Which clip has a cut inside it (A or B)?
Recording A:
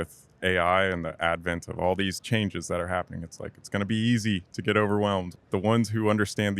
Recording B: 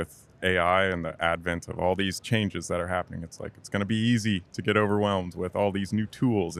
A